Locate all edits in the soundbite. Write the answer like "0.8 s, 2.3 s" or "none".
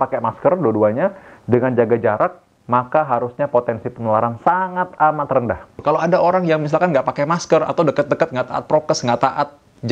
5.8 s